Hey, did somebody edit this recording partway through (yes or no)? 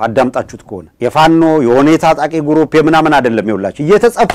no